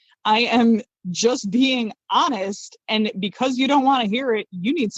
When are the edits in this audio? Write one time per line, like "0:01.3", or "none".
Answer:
none